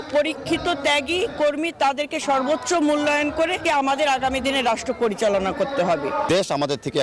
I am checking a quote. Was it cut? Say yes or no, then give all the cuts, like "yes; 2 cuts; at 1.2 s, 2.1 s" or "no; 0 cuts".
yes; 2 cuts; at 3.6 s, 6.3 s